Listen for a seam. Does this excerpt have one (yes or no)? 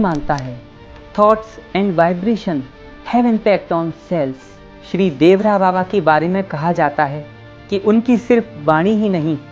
no